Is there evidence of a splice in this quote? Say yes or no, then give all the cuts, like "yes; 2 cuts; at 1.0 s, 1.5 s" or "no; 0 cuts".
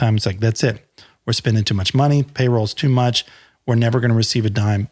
no; 0 cuts